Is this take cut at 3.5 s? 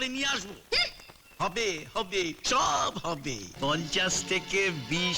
yes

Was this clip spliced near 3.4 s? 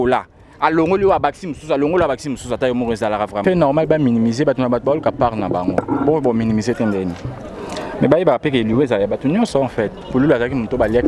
yes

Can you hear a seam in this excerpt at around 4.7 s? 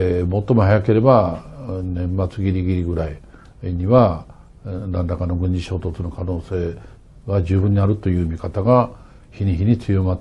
no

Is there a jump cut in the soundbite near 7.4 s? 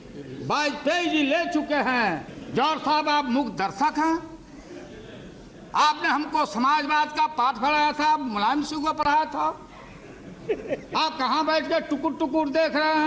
no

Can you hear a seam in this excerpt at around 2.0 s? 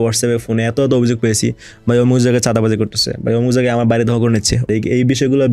no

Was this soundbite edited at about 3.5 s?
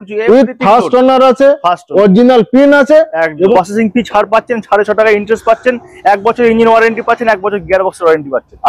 yes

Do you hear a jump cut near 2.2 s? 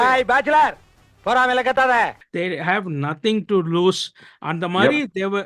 yes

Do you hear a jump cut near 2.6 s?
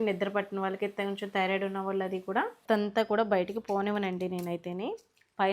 yes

